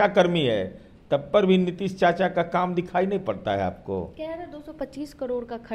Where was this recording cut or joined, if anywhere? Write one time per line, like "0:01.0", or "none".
none